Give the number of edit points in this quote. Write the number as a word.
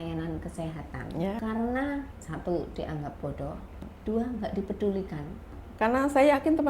four